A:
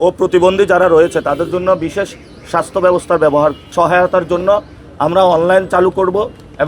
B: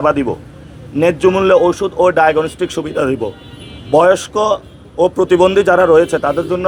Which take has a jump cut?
A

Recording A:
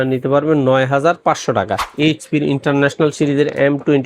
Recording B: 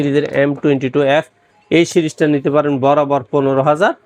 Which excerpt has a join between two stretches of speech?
A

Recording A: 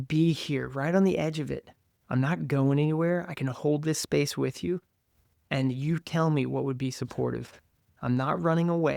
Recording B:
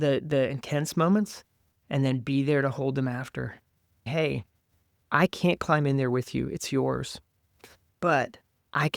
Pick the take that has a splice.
B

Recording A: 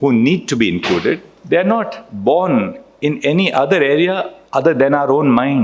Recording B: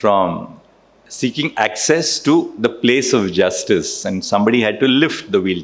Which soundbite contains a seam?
A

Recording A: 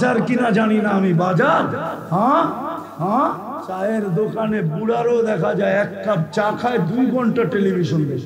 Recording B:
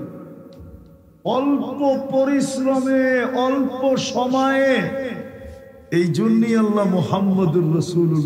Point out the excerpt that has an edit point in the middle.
A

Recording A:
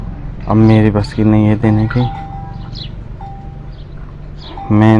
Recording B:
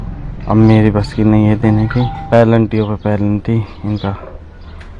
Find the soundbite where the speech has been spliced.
B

